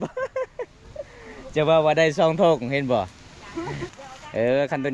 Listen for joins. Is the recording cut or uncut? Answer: cut